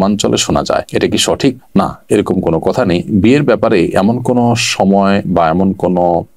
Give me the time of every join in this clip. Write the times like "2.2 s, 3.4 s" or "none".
none